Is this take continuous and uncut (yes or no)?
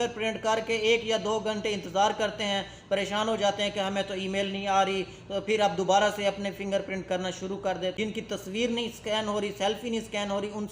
no